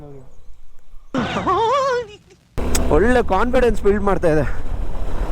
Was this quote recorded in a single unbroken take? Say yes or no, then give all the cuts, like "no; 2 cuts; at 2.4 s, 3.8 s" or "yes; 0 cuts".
no; 2 cuts; at 0.9 s, 2.6 s